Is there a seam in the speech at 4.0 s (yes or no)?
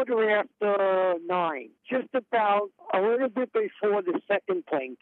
no